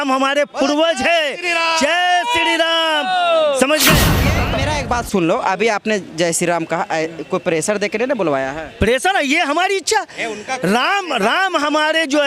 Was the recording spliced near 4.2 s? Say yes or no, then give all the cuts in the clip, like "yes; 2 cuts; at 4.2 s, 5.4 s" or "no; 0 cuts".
yes; 1 cut; at 4.2 s